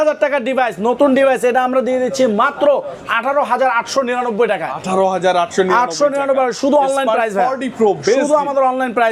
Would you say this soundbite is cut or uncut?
uncut